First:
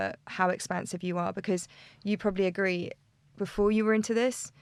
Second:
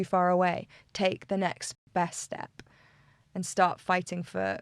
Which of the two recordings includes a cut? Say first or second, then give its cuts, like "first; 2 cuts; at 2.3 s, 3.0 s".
second; 1 cut; at 1.7 s